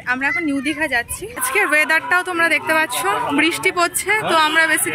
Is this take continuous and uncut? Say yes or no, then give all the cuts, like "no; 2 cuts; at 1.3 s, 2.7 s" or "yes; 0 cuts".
no; 1 cut; at 1.4 s